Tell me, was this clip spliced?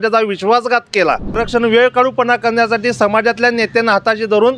yes; 1 cut; at 1.4 s

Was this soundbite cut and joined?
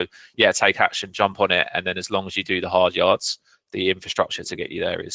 no; 0 cuts

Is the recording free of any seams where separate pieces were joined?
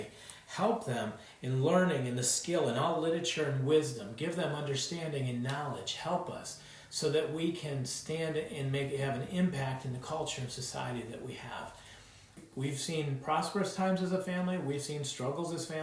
no; 1 cut; at 12.4 s

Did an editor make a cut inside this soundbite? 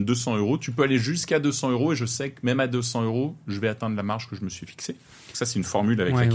no; 0 cuts

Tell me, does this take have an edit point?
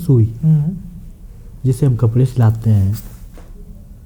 no; 0 cuts

